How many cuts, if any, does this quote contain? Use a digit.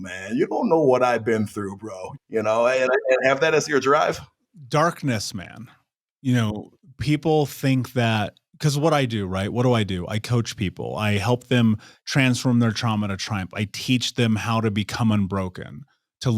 1